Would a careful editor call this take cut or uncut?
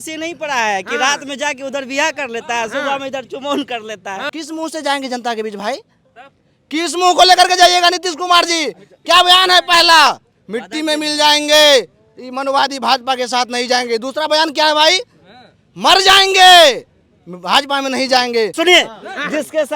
cut